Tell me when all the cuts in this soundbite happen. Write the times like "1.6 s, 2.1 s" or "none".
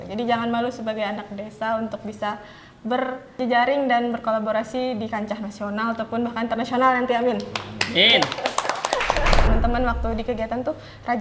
3.4 s, 9.5 s